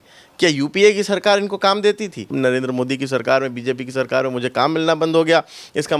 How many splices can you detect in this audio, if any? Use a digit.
1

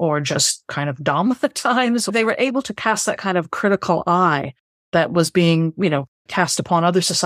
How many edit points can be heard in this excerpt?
1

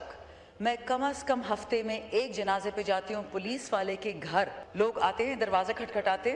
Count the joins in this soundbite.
1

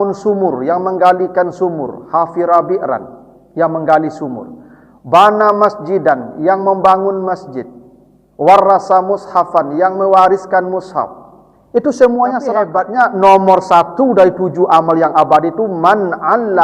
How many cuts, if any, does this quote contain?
1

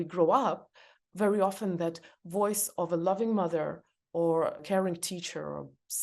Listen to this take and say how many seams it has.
1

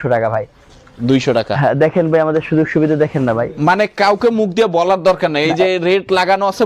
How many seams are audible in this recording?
0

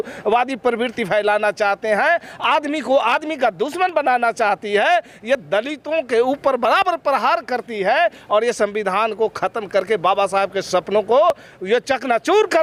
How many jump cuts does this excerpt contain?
0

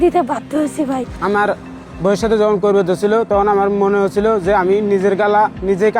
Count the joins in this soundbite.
1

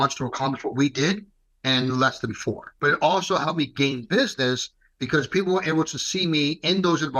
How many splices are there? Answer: 1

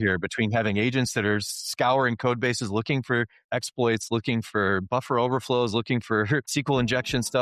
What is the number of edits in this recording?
2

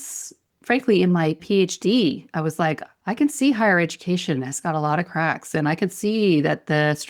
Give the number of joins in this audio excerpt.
2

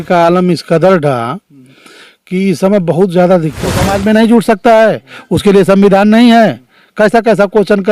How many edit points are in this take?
1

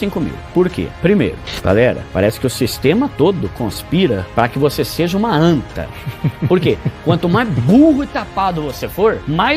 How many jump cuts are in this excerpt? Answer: 1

